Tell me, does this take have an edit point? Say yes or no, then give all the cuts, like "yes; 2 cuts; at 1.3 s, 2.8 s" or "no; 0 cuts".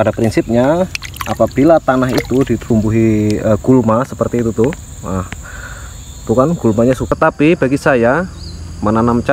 yes; 2 cuts; at 2.6 s, 7.1 s